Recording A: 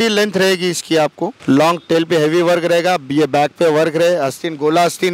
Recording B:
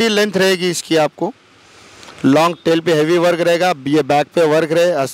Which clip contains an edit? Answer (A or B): A